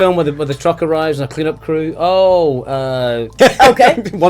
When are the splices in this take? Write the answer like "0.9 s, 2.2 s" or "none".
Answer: 3.4 s